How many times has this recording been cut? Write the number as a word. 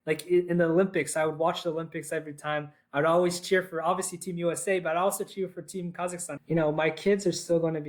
one